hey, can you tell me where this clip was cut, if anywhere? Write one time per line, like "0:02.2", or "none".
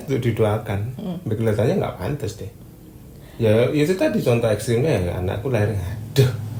none